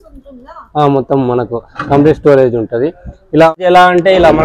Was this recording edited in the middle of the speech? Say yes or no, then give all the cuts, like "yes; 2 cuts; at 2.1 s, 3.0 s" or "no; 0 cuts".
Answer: yes; 1 cut; at 3.5 s